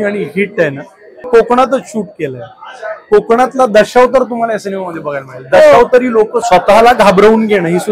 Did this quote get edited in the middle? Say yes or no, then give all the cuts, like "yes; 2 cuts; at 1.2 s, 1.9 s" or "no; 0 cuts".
yes; 2 cuts; at 1.2 s, 6.4 s